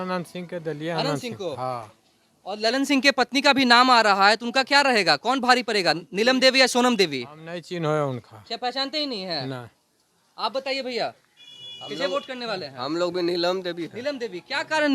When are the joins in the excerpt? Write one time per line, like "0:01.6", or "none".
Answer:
none